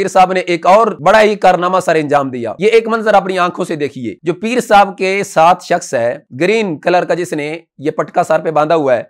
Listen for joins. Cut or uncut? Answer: cut